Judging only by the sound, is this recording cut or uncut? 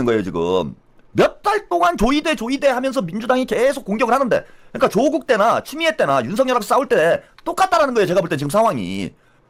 uncut